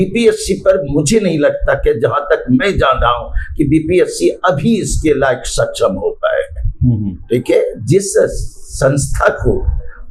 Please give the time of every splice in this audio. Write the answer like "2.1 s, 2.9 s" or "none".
none